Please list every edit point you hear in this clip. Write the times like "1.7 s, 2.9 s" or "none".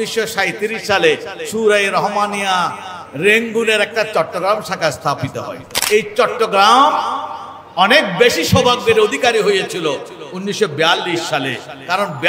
5.7 s